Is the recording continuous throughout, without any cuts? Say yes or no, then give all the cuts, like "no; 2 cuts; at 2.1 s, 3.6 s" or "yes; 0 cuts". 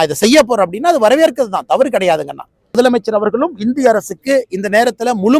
no; 1 cut; at 2.7 s